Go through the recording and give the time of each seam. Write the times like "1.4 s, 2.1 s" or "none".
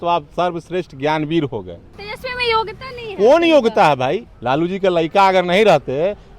2.0 s, 4.3 s